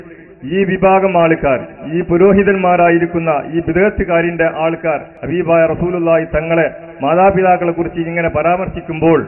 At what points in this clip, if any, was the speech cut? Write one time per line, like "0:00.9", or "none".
0:05.1